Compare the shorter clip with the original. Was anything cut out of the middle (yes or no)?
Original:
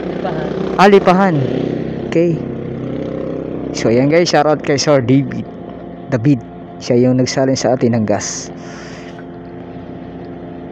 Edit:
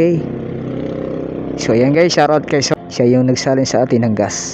yes